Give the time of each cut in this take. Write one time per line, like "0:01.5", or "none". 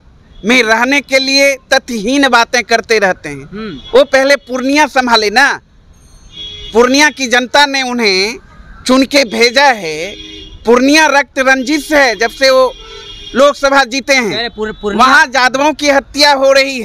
none